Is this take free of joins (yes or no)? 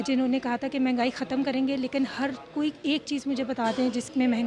yes